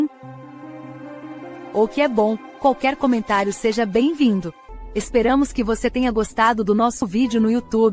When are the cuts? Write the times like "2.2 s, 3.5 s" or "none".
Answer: 4.6 s, 7.0 s